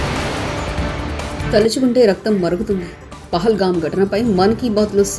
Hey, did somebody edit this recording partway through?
no; 0 cuts

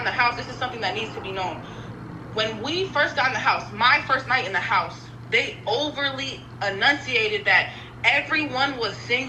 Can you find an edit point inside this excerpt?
no; 0 cuts

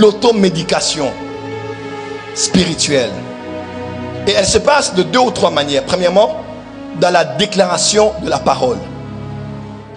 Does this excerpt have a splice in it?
no; 0 cuts

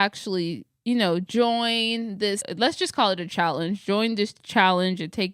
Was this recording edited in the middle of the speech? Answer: yes; 1 cut; at 2.5 s

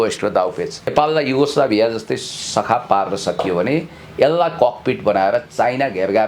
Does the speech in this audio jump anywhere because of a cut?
yes; 1 cut; at 0.9 s

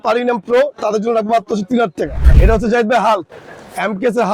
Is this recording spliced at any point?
yes; 1 cut; at 2.2 s

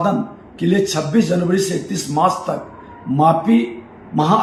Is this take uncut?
yes; 0 cuts

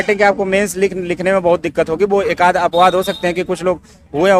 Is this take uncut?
yes; 0 cuts

